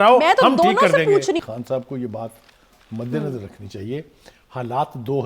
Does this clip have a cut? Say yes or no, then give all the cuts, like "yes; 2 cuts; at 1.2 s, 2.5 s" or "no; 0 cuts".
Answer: yes; 1 cut; at 1.5 s